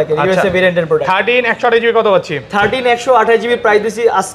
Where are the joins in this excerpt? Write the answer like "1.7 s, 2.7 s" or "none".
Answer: none

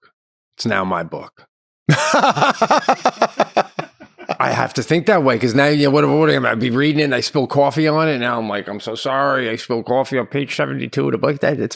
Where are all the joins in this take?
none

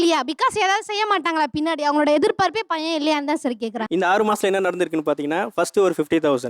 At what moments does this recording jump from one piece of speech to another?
3.8 s

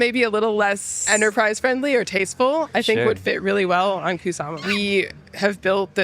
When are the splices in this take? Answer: 0.9 s, 4.6 s

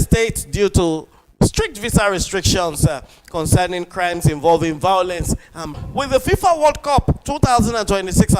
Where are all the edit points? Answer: 5.7 s

